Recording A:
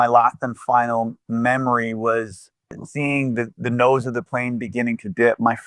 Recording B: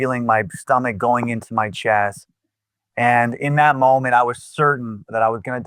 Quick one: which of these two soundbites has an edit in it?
A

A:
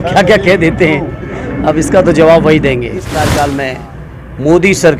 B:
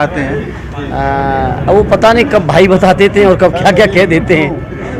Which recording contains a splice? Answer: A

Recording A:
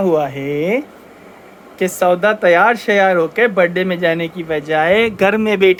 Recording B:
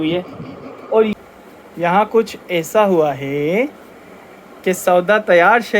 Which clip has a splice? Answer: B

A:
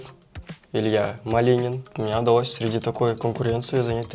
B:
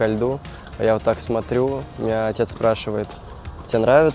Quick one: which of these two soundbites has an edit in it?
A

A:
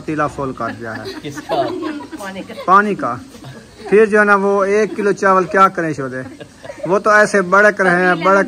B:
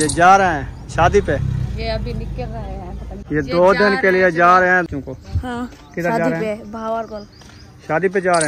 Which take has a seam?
B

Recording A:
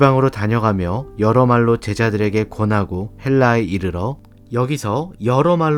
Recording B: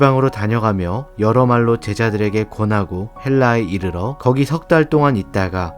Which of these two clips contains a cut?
B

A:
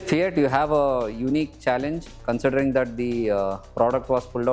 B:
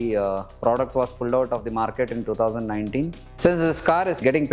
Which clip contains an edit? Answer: B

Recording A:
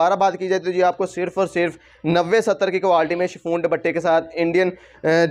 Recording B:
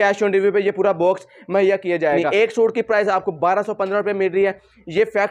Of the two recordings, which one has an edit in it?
B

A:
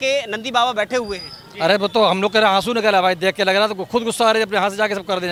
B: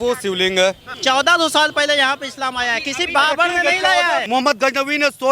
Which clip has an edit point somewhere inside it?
B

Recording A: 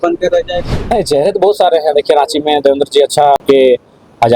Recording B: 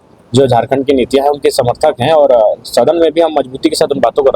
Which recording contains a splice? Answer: A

